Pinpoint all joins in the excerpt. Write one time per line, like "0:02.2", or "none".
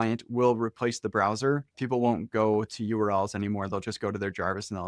0:01.8